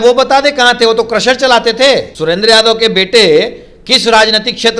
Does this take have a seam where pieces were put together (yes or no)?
yes